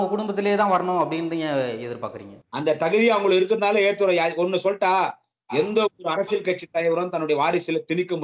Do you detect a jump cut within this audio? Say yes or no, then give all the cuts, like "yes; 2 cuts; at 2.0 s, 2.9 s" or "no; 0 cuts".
no; 0 cuts